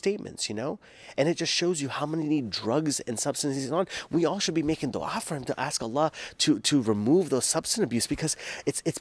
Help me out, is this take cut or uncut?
uncut